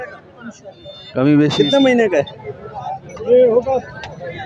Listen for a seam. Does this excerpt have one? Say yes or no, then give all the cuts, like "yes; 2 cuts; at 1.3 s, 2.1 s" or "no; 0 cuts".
yes; 1 cut; at 1.5 s